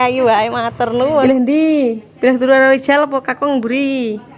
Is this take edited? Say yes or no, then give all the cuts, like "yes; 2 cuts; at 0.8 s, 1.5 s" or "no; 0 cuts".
yes; 1 cut; at 1.2 s